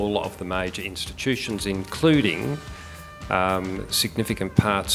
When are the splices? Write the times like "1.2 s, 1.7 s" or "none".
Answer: none